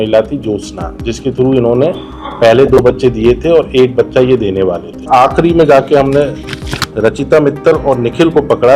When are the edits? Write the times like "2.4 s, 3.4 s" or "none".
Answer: 5.0 s